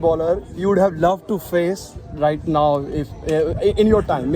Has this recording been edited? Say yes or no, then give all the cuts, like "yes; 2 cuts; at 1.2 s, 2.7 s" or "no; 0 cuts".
no; 0 cuts